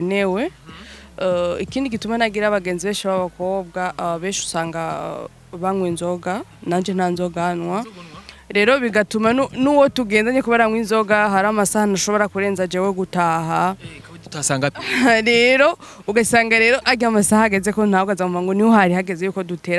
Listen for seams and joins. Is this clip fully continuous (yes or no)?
yes